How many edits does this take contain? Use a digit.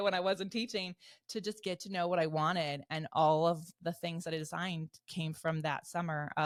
0